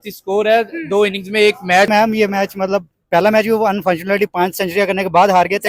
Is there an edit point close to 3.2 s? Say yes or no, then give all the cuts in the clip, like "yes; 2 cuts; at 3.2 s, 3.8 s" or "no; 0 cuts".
no; 1 cut; at 1.9 s